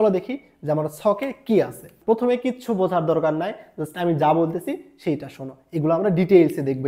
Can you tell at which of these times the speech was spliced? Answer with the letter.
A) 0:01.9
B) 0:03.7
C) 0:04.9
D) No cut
D